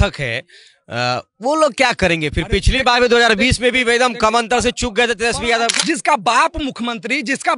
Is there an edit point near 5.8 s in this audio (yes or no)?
yes